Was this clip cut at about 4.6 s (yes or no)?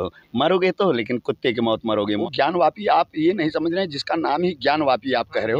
no